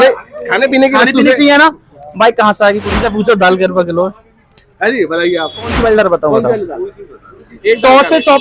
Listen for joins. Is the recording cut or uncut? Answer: cut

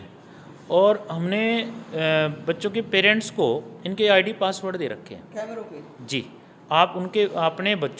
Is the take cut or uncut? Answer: uncut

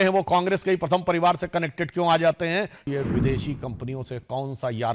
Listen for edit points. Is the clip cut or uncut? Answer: cut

